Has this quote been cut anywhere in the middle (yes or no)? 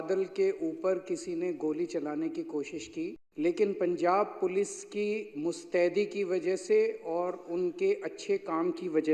yes